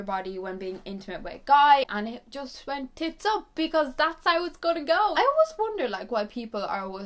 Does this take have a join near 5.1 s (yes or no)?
yes